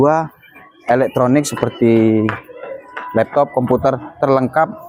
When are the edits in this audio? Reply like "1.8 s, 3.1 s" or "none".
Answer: none